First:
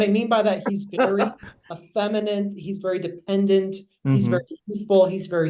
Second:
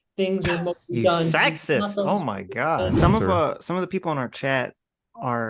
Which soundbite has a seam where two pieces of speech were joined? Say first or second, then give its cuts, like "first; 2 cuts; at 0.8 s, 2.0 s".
second; 1 cut; at 2.9 s